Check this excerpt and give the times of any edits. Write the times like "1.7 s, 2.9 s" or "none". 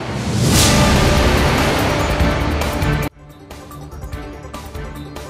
4.2 s